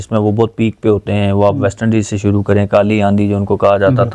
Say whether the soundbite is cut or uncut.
uncut